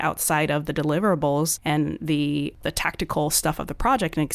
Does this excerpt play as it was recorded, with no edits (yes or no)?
no